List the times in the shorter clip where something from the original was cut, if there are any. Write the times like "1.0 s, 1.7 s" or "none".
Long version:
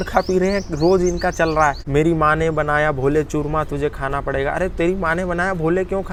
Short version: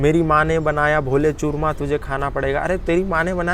none